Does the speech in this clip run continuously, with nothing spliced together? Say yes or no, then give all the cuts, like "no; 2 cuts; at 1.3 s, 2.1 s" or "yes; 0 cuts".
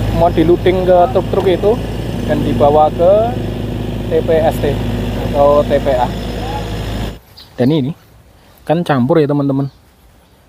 no; 1 cut; at 7.1 s